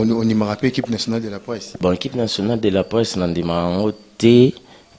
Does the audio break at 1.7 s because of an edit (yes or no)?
yes